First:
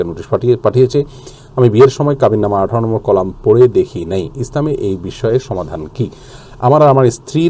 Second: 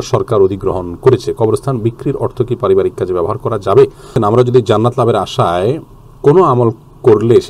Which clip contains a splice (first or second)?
second